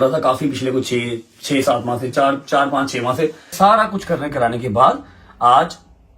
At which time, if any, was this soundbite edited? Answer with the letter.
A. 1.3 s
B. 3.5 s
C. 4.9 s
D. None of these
B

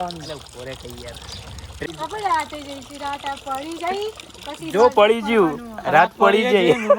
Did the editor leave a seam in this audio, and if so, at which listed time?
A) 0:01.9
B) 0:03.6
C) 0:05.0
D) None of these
A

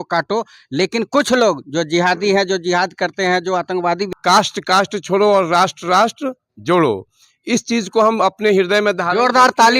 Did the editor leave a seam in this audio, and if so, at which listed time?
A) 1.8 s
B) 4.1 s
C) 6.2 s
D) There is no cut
B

